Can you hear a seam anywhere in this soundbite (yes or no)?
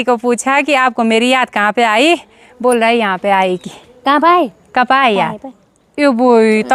no